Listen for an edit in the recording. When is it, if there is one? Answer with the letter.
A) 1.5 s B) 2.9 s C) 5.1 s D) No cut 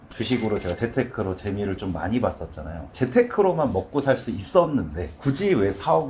B